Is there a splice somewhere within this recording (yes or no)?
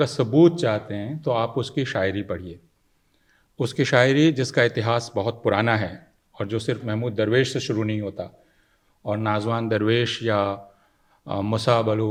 no